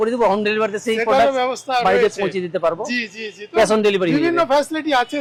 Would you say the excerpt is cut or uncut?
uncut